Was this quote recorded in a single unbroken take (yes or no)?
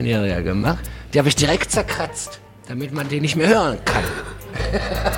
no